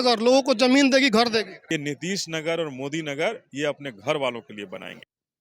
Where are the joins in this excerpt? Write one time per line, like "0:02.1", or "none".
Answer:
0:01.6